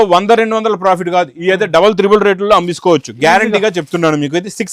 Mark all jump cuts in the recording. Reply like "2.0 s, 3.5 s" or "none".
none